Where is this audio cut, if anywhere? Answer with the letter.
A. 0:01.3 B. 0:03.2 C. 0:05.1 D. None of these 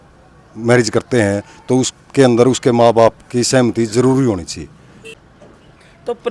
C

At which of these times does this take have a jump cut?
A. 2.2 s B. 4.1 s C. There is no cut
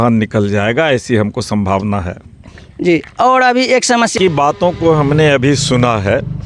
B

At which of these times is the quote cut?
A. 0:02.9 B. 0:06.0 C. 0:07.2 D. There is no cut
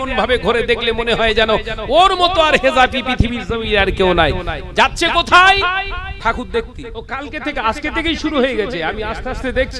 C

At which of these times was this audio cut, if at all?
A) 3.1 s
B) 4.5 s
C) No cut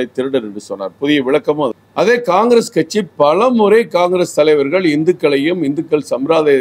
C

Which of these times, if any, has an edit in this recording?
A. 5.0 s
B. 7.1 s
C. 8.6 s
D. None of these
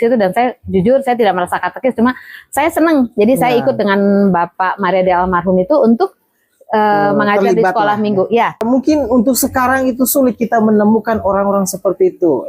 C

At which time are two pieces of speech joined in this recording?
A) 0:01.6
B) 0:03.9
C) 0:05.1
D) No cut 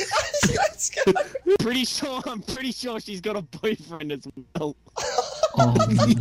A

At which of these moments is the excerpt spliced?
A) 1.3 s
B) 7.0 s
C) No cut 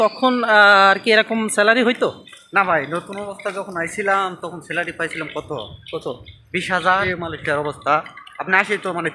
B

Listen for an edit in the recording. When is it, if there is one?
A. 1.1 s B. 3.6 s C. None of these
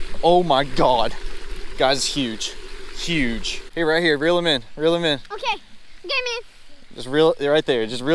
B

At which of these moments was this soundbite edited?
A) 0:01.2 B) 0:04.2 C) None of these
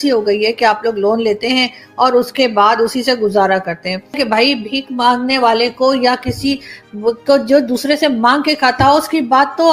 B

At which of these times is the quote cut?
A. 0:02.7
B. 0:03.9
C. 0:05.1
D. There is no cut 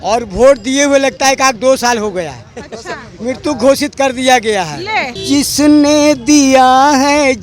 C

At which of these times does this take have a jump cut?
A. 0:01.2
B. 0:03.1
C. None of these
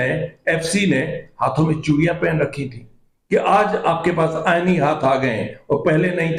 C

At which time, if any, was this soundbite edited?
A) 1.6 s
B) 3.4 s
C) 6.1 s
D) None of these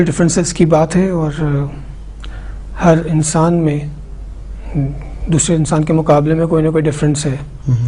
D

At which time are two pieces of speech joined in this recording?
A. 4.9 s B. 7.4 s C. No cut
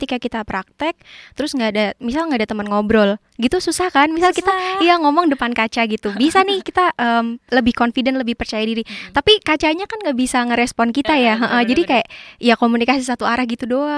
C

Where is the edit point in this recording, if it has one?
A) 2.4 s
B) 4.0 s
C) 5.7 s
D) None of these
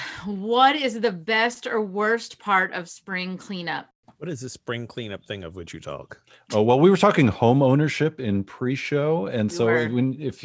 B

